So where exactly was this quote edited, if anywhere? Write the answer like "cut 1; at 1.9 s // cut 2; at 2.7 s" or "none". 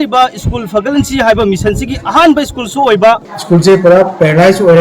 cut 1; at 3.2 s